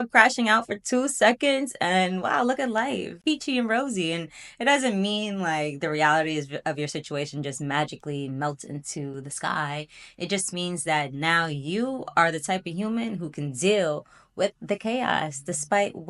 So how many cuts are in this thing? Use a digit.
0